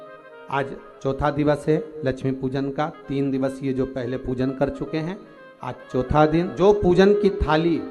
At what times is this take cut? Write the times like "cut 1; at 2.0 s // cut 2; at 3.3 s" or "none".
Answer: cut 1; at 6.5 s